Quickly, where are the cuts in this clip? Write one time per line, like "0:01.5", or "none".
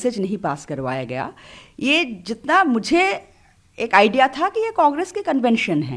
none